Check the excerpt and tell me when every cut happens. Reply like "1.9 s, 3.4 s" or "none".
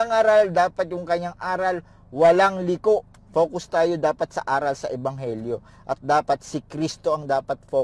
3.2 s